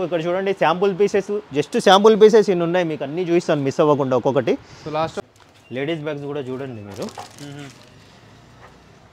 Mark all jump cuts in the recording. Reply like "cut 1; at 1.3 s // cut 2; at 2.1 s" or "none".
cut 1; at 5.1 s